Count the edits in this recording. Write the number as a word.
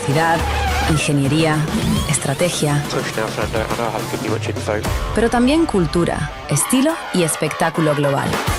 zero